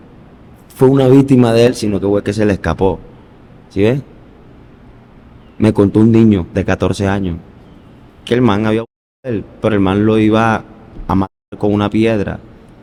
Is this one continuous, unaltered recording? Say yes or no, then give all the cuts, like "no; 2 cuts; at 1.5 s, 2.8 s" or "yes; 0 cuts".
yes; 0 cuts